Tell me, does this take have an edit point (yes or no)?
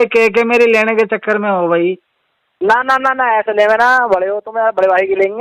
no